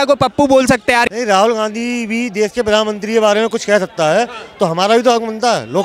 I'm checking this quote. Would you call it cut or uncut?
cut